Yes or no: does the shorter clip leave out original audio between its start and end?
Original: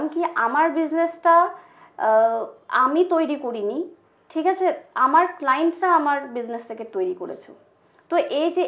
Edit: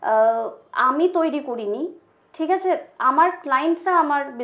no